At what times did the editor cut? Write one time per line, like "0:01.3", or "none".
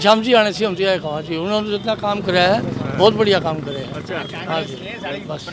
none